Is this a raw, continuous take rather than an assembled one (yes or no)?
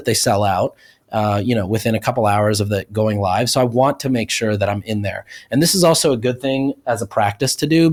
yes